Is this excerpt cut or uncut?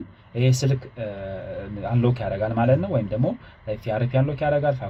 uncut